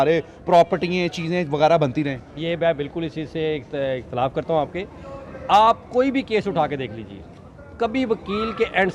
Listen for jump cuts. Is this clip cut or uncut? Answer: uncut